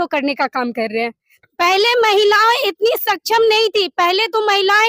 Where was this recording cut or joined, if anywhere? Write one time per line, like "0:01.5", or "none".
0:01.3